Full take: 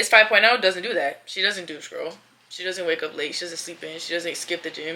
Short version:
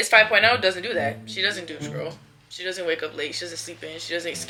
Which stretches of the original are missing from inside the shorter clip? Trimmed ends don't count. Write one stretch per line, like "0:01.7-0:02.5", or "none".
none